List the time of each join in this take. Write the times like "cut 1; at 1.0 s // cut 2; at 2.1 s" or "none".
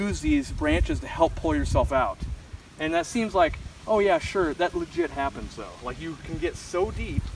none